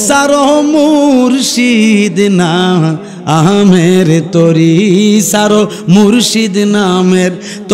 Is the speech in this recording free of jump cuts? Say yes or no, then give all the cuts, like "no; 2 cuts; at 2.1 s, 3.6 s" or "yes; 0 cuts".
yes; 0 cuts